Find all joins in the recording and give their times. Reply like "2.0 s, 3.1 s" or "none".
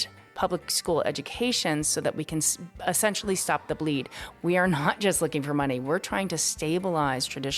4.2 s